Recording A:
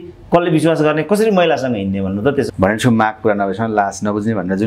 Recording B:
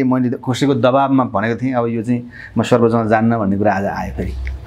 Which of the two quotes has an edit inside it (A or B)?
A